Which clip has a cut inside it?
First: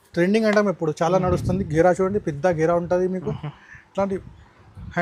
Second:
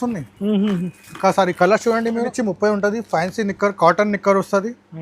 second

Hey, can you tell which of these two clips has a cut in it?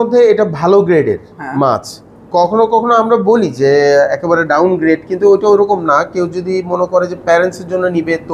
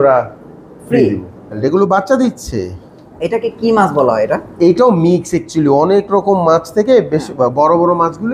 second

